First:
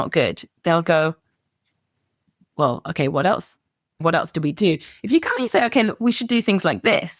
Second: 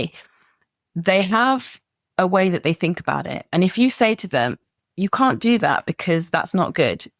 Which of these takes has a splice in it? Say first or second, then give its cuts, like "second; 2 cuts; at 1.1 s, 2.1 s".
first; 1 cut; at 4.0 s